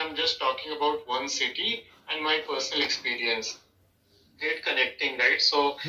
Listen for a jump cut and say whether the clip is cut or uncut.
cut